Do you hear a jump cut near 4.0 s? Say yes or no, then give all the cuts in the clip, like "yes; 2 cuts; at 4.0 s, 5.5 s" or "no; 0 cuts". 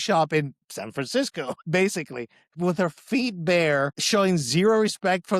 yes; 2 cuts; at 1.6 s, 4.0 s